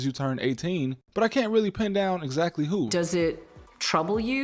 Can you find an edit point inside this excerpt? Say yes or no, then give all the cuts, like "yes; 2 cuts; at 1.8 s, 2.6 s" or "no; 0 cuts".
no; 0 cuts